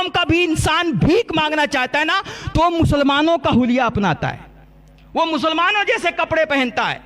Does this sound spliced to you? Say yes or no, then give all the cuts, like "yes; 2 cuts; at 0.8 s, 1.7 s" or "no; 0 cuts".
no; 0 cuts